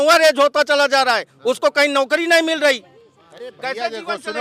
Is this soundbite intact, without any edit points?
yes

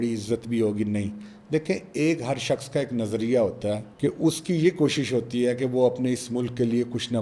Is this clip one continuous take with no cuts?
yes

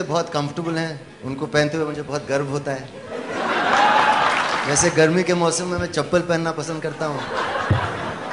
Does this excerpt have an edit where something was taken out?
yes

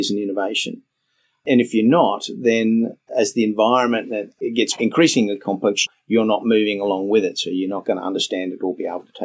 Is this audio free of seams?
yes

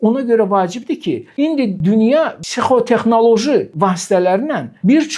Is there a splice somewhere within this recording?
yes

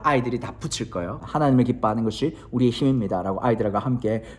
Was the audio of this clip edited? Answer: yes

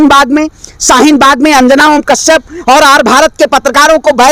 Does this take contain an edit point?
no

